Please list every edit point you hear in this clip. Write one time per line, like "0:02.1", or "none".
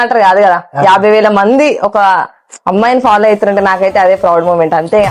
none